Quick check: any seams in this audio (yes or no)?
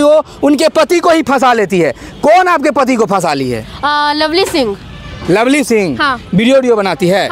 no